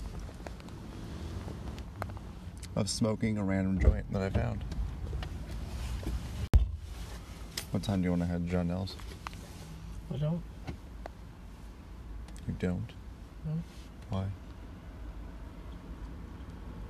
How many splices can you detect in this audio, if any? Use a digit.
1